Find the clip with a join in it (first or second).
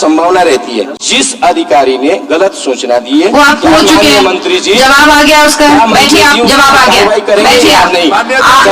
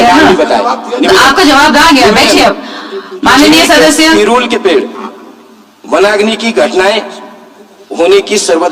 first